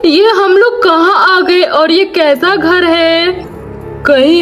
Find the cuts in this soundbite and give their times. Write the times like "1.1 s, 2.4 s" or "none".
none

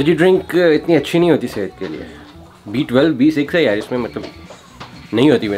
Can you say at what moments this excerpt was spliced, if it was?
none

